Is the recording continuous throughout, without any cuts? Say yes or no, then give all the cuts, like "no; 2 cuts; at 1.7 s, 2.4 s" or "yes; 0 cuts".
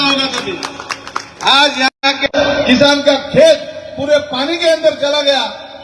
yes; 0 cuts